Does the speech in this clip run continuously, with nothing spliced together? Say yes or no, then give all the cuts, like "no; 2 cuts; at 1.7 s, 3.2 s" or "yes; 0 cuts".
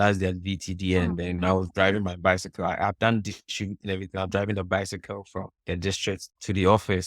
yes; 0 cuts